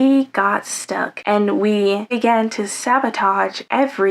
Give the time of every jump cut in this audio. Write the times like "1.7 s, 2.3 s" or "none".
1.1 s